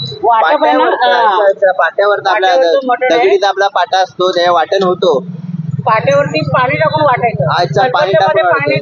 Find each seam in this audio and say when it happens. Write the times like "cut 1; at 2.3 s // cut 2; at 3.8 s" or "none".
none